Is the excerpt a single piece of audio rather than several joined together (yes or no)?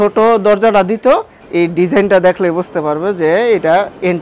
no